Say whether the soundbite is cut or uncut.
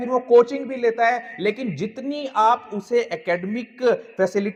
uncut